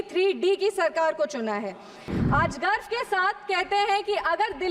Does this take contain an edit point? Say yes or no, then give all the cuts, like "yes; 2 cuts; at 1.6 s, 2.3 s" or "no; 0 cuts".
yes; 1 cut; at 2.1 s